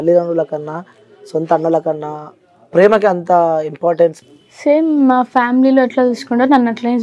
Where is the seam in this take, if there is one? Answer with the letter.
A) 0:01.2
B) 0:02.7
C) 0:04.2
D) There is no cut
C